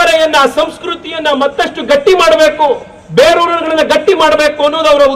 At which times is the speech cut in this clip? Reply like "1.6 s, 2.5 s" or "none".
none